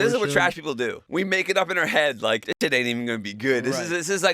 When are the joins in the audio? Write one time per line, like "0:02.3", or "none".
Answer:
0:01.0
0:02.5